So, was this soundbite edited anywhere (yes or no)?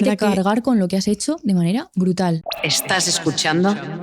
yes